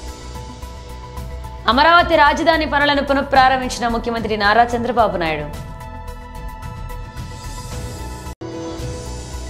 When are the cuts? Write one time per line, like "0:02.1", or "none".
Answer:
0:01.1
0:05.5